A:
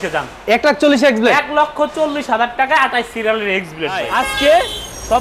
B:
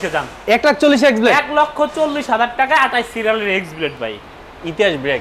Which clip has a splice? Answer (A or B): A